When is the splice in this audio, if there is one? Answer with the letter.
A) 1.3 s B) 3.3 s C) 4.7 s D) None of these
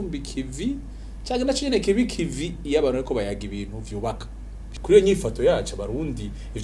C